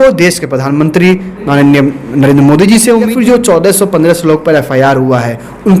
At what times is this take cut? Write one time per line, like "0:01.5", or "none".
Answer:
0:03.1